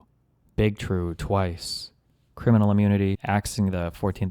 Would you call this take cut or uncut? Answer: cut